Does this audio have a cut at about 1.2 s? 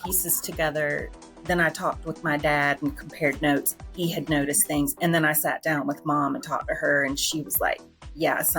yes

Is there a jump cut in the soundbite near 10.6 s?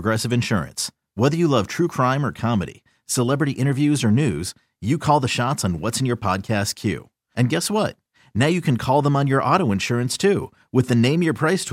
no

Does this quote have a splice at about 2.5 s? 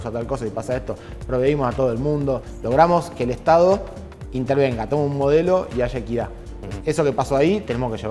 yes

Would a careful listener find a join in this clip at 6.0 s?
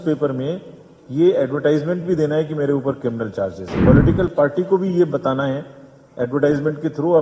no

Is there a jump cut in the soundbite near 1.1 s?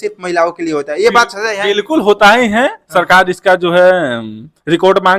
no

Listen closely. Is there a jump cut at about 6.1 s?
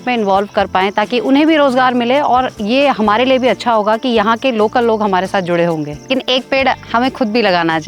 yes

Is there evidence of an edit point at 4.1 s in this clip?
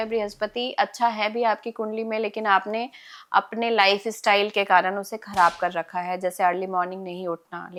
no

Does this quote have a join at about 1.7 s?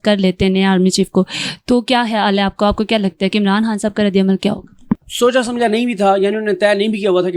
no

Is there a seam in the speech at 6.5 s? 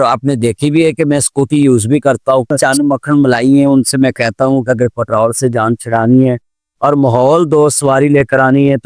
no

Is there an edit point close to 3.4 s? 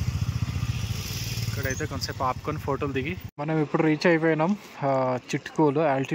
yes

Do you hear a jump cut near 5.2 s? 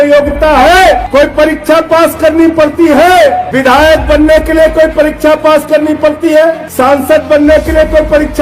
no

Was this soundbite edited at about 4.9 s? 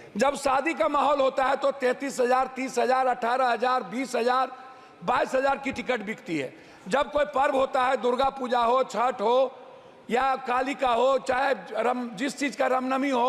no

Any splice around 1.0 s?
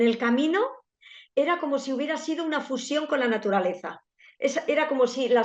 yes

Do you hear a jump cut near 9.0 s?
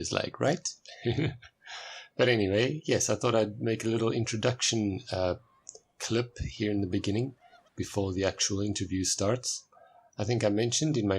no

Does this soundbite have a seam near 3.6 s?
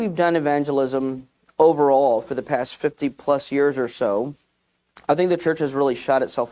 no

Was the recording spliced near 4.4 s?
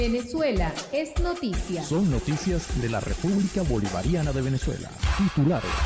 yes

